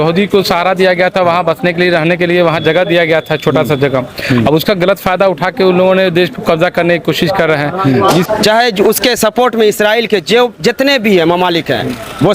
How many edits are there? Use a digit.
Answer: 1